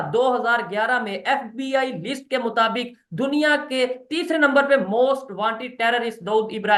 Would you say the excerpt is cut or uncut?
uncut